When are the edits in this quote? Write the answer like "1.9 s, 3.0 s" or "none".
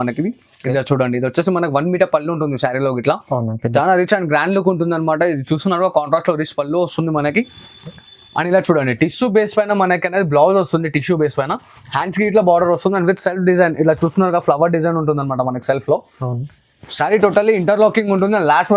none